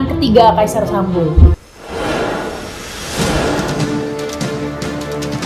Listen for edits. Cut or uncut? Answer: uncut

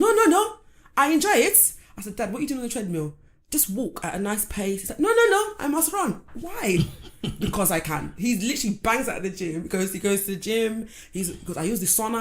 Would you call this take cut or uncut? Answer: uncut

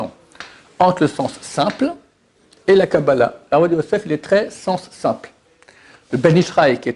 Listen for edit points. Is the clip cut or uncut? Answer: uncut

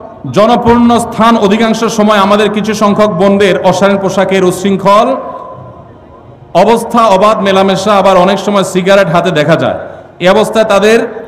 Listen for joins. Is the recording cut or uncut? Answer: uncut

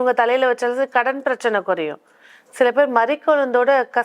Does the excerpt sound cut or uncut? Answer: uncut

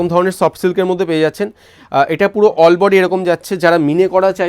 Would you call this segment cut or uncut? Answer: uncut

